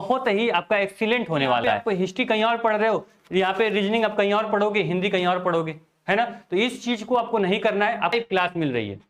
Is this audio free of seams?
no; 2 cuts; at 1.8 s, 8.1 s

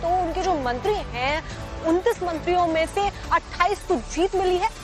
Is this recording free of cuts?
no; 1 cut; at 3.0 s

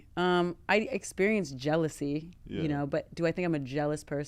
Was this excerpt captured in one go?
yes; 0 cuts

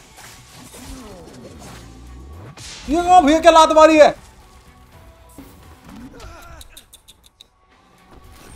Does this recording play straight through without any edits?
no; 1 cut; at 5.4 s

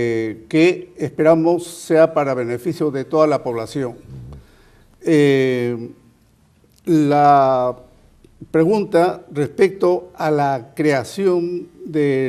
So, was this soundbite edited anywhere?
no; 0 cuts

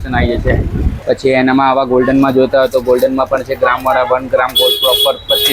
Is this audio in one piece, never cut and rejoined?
no; 1 cut; at 1.0 s

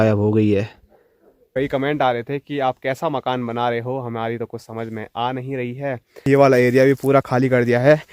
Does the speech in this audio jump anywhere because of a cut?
yes; 2 cuts; at 1.4 s, 6.1 s

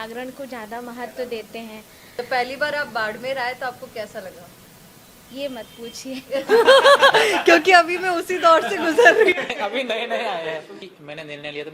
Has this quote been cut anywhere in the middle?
yes; 2 cuts; at 2.2 s, 10.8 s

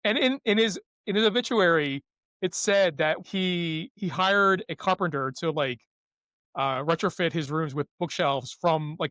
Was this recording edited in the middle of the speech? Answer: yes; 1 cut; at 3.2 s

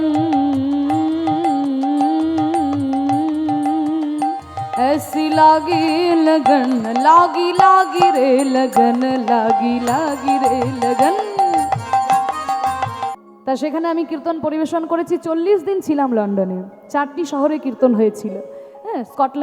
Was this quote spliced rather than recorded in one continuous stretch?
yes; 1 cut; at 13.0 s

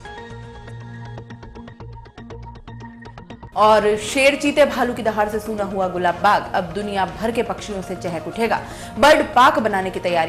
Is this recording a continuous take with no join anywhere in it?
no; 1 cut; at 3.4 s

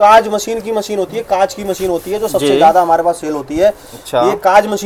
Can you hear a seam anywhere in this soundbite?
no; 0 cuts

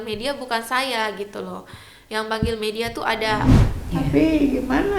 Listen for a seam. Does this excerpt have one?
yes; 1 cut; at 3.5 s

